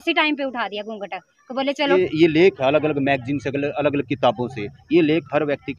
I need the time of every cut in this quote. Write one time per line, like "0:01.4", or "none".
0:01.9